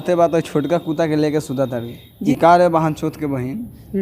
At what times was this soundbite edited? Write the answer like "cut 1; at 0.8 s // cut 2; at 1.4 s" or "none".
cut 1; at 2.0 s